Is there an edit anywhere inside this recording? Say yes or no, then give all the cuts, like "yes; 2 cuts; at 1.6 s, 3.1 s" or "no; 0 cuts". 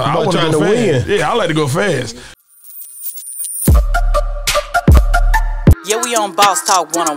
yes; 1 cut; at 2.3 s